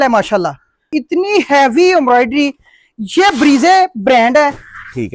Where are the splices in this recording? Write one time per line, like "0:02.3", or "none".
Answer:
0:00.9